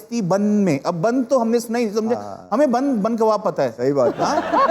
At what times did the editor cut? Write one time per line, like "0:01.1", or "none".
none